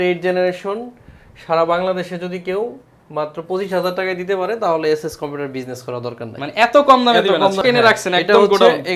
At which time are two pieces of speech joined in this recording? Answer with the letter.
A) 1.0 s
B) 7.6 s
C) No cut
B